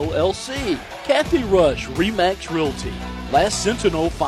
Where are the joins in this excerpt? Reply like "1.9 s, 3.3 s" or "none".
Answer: 0.9 s